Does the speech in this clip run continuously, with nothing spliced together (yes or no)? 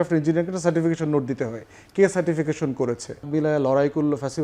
no